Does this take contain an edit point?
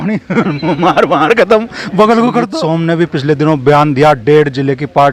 yes; 1 cut; at 2.6 s

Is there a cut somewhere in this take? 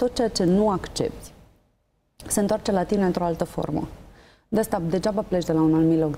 no; 0 cuts

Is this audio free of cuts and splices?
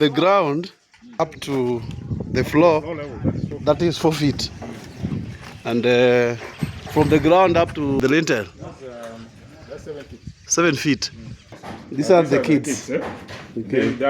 no; 3 cuts; at 1.2 s, 8.0 s, 11.6 s

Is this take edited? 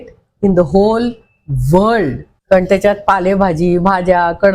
yes; 1 cut; at 2.3 s

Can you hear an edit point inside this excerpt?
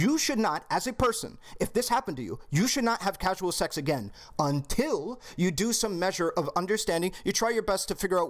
no; 0 cuts

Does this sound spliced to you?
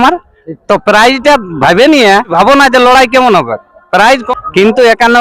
yes; 2 cuts; at 2.3 s, 4.3 s

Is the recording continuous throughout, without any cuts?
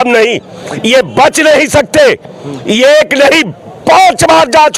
yes; 0 cuts

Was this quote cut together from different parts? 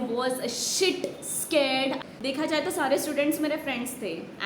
yes; 1 cut; at 2.0 s

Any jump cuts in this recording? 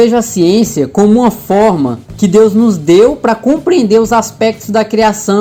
no; 0 cuts

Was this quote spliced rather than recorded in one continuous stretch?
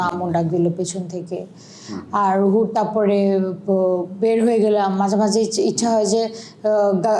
no; 0 cuts

